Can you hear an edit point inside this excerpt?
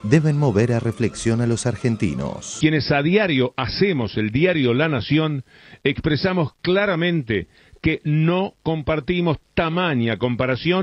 yes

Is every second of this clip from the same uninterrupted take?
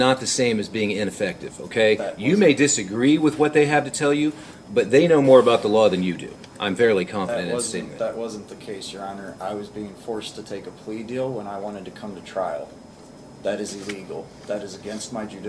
yes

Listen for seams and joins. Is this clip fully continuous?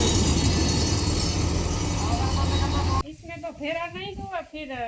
no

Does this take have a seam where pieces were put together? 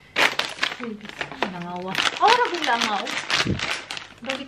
no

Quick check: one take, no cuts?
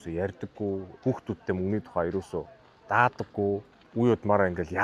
no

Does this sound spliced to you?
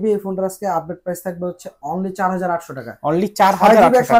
no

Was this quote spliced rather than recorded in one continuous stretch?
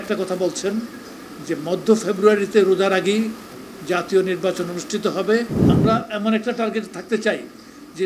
yes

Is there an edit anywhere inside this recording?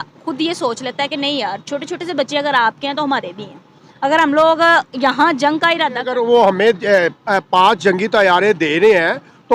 yes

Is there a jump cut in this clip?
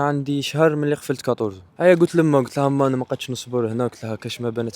yes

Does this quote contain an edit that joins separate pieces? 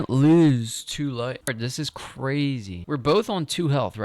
yes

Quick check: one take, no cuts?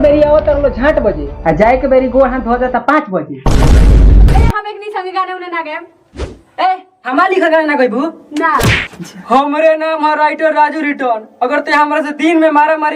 no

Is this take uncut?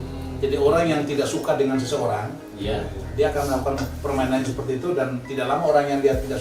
yes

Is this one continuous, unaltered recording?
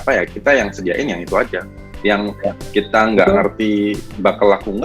yes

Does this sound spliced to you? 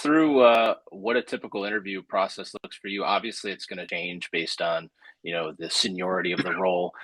yes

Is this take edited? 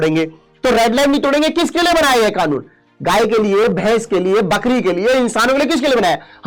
no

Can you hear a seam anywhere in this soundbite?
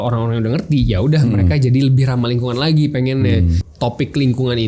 yes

